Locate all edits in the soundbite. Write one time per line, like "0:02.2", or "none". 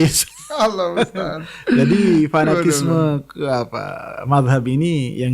none